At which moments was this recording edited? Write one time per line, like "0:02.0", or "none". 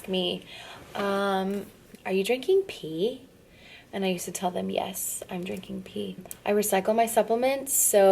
0:01.9
0:06.3